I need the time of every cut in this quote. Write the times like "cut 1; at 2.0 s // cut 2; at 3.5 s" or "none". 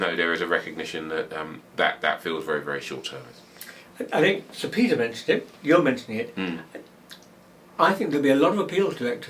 none